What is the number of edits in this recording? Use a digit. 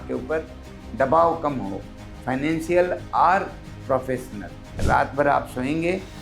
1